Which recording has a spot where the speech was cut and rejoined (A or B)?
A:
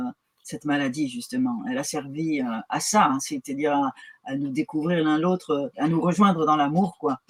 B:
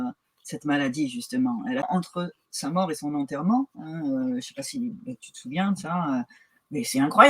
B